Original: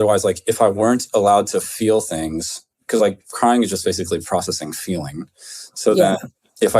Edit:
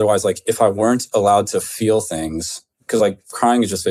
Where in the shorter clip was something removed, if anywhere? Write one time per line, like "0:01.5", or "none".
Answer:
none